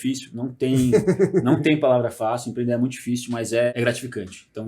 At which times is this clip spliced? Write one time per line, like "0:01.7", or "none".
0:03.7